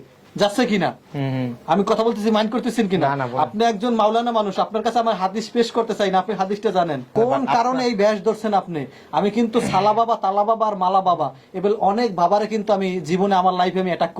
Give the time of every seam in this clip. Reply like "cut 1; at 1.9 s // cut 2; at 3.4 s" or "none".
cut 1; at 7.1 s